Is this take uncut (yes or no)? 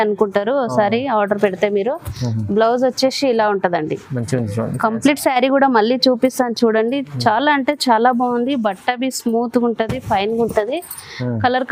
yes